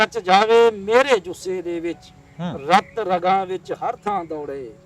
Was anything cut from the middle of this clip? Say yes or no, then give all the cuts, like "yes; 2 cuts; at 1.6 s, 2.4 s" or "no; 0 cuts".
no; 0 cuts